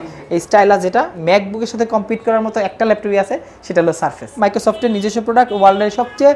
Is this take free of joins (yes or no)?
no